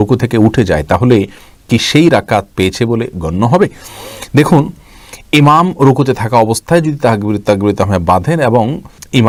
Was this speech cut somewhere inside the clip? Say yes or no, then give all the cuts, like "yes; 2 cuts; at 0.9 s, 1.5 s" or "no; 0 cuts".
no; 0 cuts